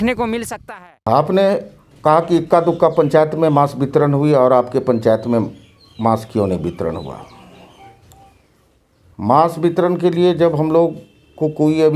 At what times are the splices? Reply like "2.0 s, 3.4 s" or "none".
1.0 s